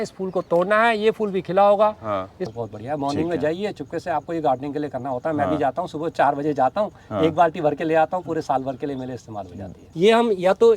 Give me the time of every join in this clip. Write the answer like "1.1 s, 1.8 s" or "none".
2.5 s, 9.8 s